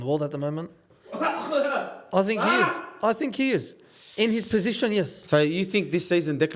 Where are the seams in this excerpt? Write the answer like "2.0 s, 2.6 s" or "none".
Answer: none